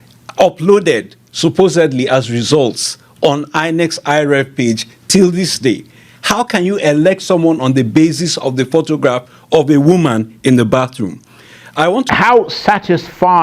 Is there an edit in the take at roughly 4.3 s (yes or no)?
no